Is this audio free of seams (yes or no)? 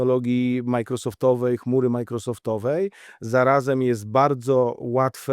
yes